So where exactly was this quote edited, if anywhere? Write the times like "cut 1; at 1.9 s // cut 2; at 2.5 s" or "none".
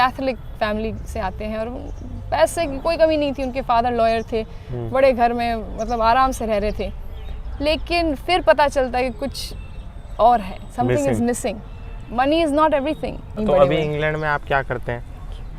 cut 1; at 13.3 s